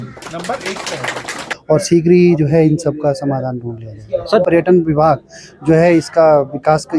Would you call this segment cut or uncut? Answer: cut